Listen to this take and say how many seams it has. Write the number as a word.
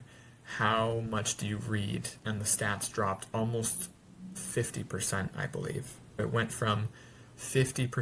two